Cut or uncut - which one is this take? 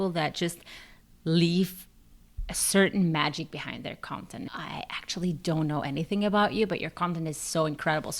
cut